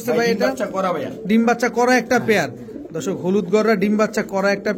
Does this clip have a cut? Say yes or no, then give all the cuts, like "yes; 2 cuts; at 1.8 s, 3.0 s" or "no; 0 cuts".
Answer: no; 0 cuts